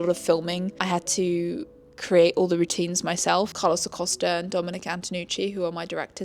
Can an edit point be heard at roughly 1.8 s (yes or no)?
no